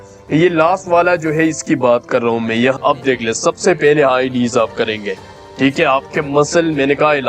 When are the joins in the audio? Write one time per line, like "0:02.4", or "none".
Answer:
0:02.8